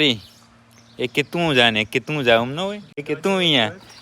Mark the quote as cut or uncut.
cut